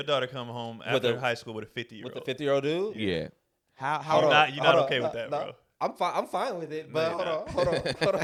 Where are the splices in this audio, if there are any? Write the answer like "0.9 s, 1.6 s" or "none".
none